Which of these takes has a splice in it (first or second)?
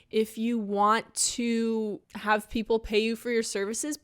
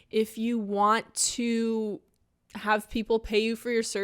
first